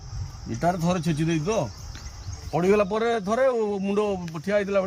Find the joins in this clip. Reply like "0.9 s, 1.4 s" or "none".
none